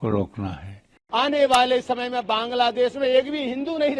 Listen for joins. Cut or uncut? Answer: cut